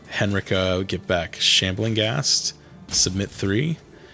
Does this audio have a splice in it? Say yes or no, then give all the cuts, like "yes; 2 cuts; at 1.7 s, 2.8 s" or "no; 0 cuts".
no; 0 cuts